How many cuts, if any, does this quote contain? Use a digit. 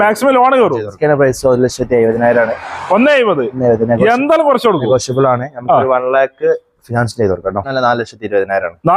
2